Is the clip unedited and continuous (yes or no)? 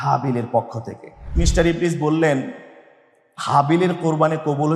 no